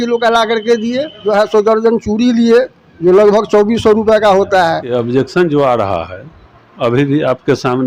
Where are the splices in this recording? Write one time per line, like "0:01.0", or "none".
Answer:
0:01.1
0:04.9